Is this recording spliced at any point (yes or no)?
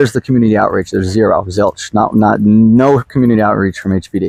no